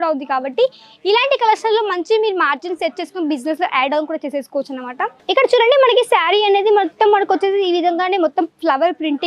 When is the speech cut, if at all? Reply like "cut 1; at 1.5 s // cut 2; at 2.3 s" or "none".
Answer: cut 1; at 5.2 s